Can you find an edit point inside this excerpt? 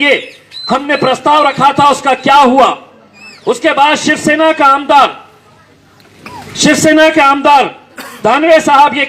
no; 0 cuts

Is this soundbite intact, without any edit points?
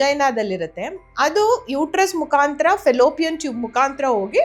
yes; 0 cuts

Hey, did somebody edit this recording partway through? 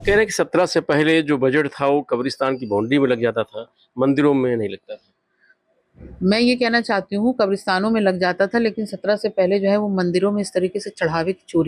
no; 0 cuts

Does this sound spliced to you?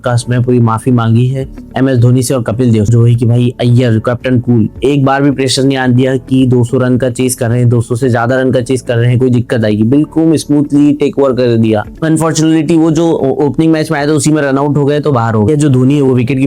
yes; 3 cuts; at 2.9 s, 11.9 s, 15.5 s

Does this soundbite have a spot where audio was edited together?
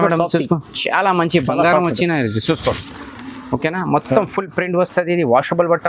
no; 0 cuts

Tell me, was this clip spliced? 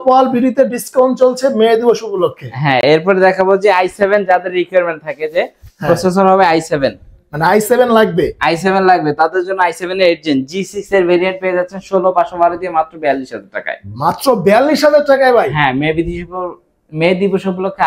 no; 0 cuts

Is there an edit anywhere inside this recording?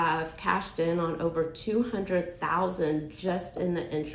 no; 0 cuts

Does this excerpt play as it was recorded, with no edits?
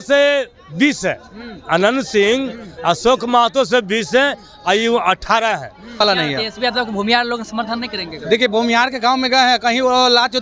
no; 1 cut; at 6.0 s

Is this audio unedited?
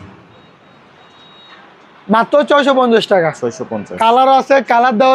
yes; 0 cuts

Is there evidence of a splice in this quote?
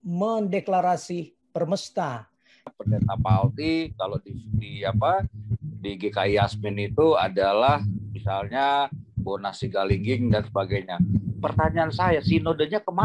yes; 1 cut; at 2.7 s

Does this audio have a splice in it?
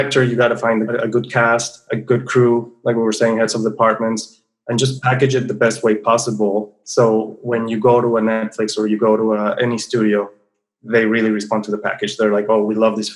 yes; 1 cut; at 0.9 s

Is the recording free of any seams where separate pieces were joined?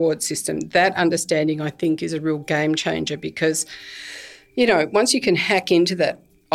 yes; 0 cuts

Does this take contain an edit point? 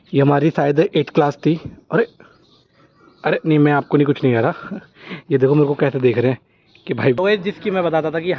no; 0 cuts

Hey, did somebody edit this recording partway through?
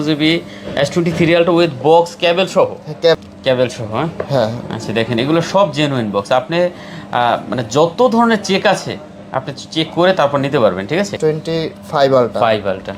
yes; 2 cuts; at 3.2 s, 11.1 s

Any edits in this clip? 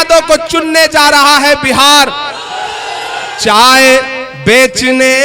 yes; 1 cut; at 3.3 s

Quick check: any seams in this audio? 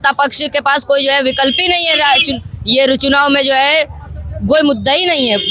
no; 0 cuts

